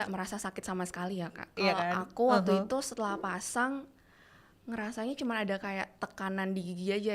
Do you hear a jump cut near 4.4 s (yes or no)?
no